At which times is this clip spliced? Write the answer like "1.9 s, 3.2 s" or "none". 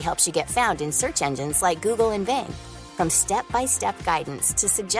none

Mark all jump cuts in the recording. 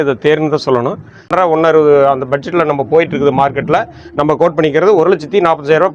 1.3 s

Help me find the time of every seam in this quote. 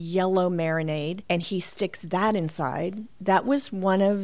1.2 s, 3.1 s

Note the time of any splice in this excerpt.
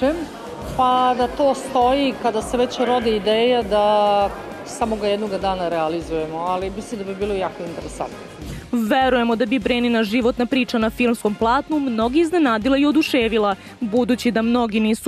none

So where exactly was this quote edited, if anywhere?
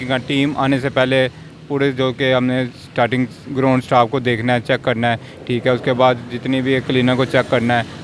none

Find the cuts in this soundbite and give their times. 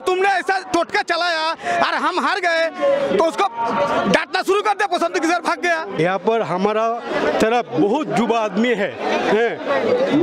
5.9 s

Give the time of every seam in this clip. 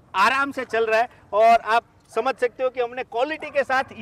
none

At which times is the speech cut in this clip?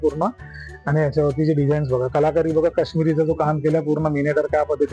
none

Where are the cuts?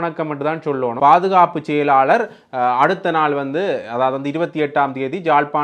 1.0 s

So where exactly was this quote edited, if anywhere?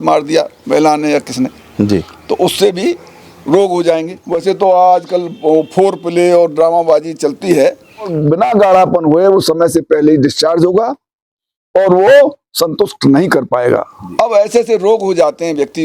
4.3 s, 8.2 s, 14.0 s

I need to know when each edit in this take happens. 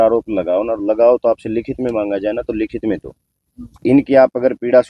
3.8 s

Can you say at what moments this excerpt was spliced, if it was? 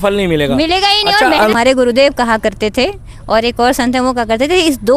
1.5 s

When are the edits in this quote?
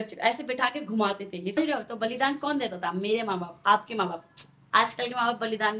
1.6 s

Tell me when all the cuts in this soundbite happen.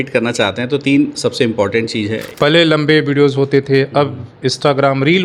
2.2 s

